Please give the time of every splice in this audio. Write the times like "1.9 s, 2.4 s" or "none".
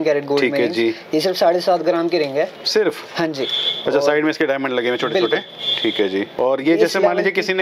none